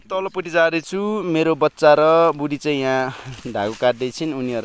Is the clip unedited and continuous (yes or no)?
yes